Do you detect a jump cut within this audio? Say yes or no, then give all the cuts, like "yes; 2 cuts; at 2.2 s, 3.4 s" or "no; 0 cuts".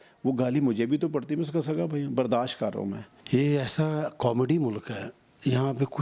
yes; 1 cut; at 3.1 s